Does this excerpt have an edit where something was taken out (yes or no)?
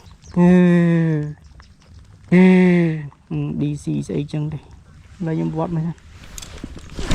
yes